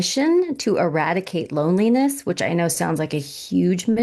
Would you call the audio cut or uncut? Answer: uncut